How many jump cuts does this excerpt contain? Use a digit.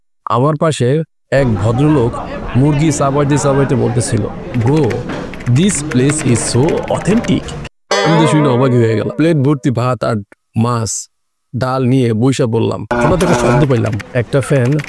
2